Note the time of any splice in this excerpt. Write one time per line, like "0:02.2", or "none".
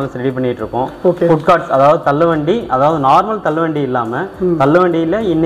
none